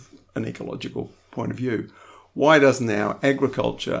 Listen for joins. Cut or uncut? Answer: uncut